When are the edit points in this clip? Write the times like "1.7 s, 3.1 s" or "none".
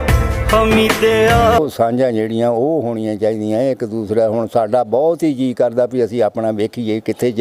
1.6 s